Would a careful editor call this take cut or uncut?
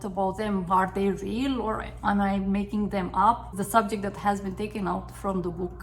cut